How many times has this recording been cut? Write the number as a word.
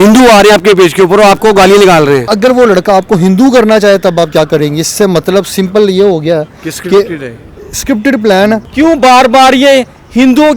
two